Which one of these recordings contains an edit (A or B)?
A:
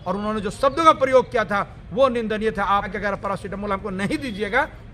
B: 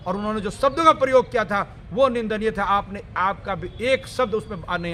A